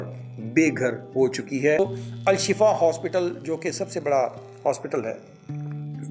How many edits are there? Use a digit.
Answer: 1